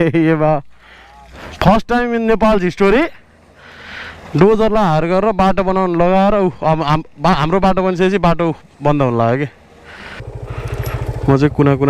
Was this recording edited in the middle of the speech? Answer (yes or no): yes